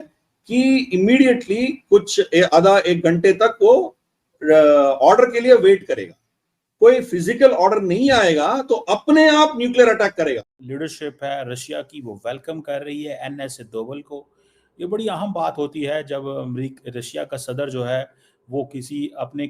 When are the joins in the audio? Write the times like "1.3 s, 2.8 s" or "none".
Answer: 10.5 s